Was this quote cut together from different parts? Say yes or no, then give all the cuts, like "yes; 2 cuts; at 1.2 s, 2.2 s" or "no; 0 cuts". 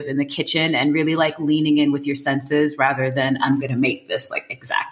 no; 0 cuts